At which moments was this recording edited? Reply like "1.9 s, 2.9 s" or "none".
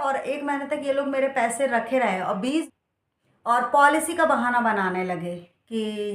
2.7 s